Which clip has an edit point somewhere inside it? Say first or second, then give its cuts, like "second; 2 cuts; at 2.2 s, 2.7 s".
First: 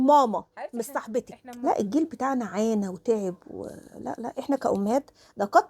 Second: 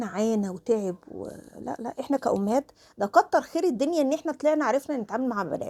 first; 1 cut; at 1.4 s